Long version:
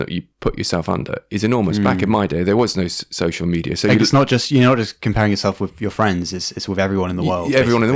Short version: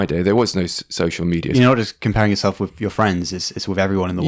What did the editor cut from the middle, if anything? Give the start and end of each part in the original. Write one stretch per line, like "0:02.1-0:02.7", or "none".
0:03.7-0:04.5